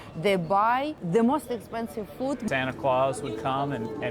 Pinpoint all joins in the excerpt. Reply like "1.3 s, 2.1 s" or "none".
1.0 s, 2.4 s